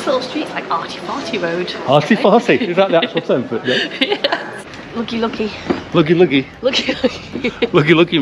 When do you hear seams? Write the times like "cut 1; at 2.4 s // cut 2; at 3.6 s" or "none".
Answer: cut 1; at 4.7 s

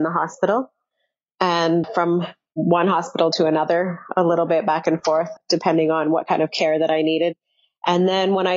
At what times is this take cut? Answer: cut 1; at 1.9 s // cut 2; at 5.3 s

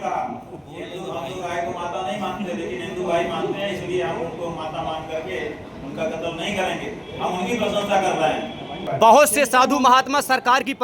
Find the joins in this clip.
cut 1; at 8.8 s

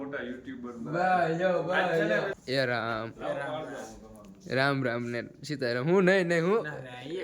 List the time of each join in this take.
cut 1; at 2.4 s

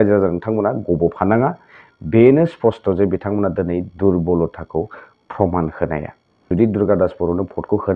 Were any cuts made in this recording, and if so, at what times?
cut 1; at 6.3 s

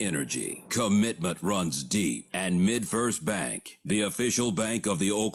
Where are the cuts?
none

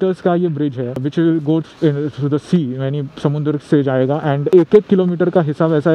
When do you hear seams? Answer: cut 1; at 1.0 s

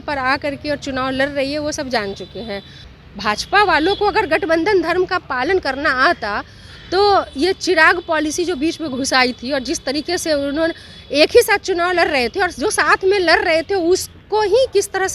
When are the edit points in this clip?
cut 1; at 2.8 s

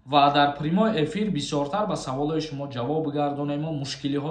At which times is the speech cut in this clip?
none

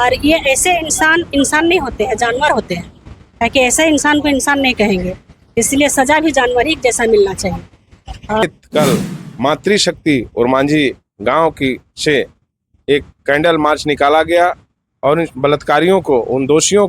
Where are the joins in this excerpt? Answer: cut 1; at 8.4 s

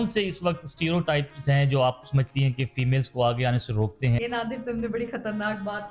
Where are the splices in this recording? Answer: cut 1; at 4.2 s

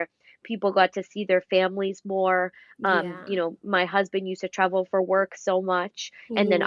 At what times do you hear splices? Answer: none

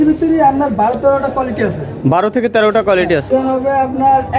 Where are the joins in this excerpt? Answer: cut 1; at 3.2 s

